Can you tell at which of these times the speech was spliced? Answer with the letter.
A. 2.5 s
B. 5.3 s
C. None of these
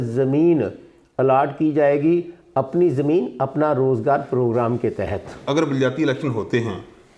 B